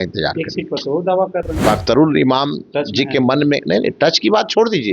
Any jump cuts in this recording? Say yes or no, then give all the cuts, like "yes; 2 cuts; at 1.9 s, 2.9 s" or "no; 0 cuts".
yes; 1 cut; at 1.5 s